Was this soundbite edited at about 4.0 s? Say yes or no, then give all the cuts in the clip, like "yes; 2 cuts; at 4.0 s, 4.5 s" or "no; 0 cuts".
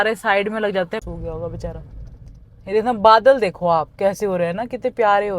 no; 1 cut; at 1.0 s